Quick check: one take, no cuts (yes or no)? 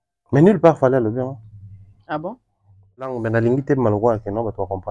no